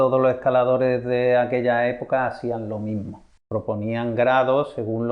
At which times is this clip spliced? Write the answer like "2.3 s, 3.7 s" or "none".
3.3 s